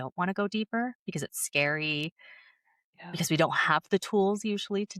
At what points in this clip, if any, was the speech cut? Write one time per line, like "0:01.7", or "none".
none